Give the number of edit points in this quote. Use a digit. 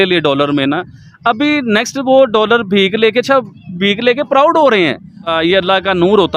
1